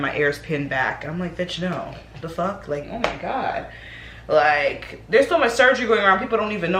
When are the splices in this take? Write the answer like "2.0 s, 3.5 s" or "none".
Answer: 2.8 s